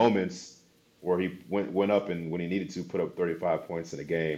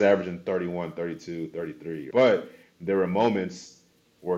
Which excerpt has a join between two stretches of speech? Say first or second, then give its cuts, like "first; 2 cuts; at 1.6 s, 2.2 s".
second; 1 cut; at 2.0 s